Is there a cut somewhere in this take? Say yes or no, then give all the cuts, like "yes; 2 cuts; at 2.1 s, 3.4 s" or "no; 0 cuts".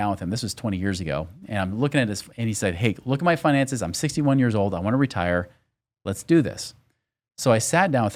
no; 0 cuts